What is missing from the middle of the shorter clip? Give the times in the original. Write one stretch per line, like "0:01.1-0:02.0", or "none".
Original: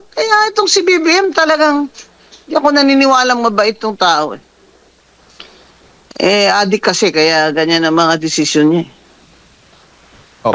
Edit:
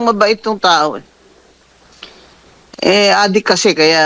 none